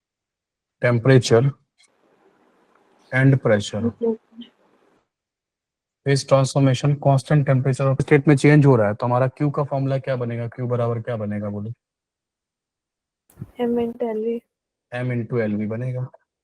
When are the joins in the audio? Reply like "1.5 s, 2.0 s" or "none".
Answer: 8.0 s